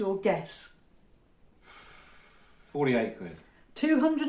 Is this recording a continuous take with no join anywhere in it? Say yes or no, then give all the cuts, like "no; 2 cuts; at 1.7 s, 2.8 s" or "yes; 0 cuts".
no; 1 cut; at 1.5 s